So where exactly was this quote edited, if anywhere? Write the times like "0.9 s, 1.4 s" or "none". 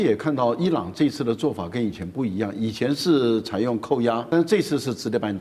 4.2 s